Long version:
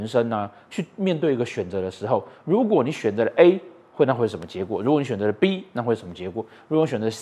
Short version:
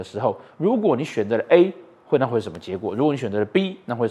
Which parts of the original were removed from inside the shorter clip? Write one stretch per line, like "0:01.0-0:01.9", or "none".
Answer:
none